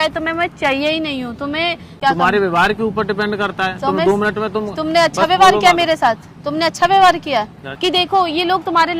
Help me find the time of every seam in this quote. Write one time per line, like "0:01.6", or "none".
0:02.0
0:07.6